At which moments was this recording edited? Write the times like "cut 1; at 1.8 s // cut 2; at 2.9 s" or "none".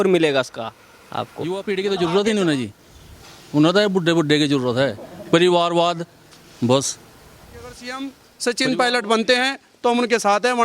cut 1; at 1.5 s // cut 2; at 7.8 s